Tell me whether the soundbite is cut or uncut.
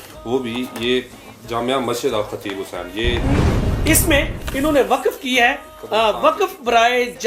cut